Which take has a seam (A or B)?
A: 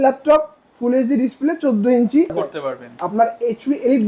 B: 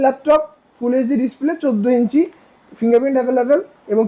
A